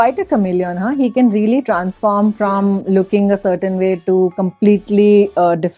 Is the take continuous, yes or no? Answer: yes